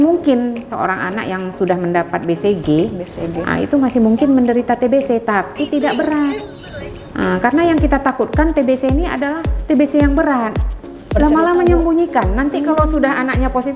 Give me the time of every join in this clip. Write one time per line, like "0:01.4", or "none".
0:11.1